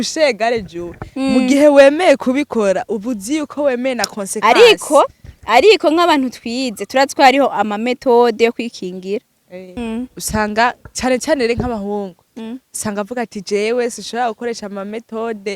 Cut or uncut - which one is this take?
cut